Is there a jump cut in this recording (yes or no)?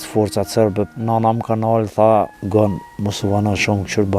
yes